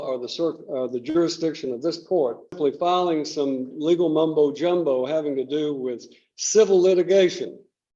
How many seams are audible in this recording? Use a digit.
1